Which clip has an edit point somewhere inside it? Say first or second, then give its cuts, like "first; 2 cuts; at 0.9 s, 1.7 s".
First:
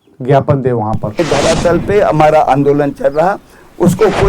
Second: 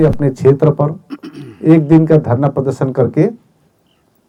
first; 1 cut; at 1.2 s